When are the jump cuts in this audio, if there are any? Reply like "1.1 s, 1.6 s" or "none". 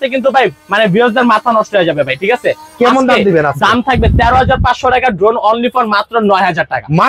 none